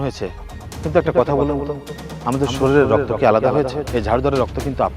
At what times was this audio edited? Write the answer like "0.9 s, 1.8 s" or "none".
3.8 s